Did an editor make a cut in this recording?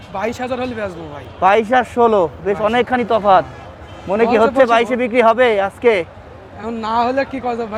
no; 0 cuts

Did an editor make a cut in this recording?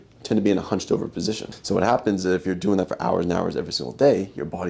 no; 0 cuts

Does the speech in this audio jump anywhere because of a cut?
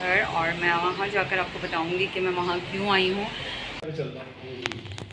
yes; 1 cut; at 3.8 s

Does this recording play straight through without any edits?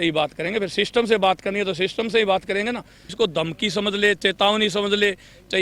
no; 1 cut; at 3.1 s

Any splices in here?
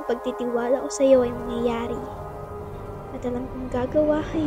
no; 0 cuts

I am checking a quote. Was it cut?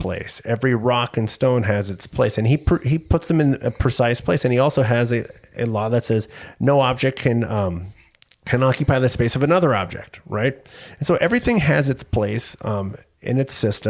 no; 0 cuts

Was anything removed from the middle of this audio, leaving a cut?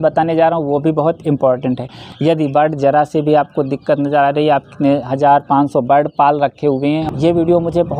yes; 2 cuts; at 2.0 s, 7.0 s

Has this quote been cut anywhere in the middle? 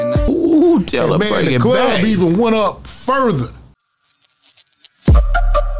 yes; 1 cut; at 3.8 s

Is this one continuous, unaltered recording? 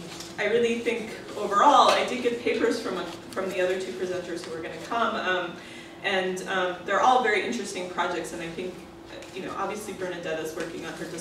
no; 1 cut; at 2.4 s

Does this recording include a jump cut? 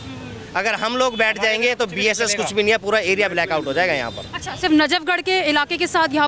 no; 0 cuts

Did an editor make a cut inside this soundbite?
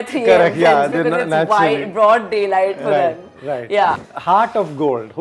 yes; 1 cut; at 4.0 s

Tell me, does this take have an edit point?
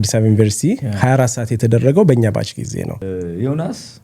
yes; 1 cut; at 3.0 s

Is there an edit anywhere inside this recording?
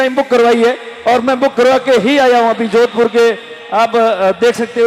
no; 0 cuts

